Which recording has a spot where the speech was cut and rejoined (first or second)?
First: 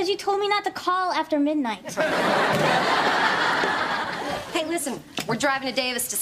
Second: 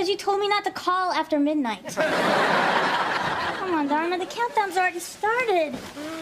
second